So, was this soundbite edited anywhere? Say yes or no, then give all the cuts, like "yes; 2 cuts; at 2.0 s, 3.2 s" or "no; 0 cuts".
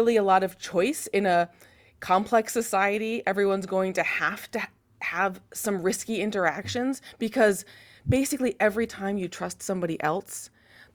no; 0 cuts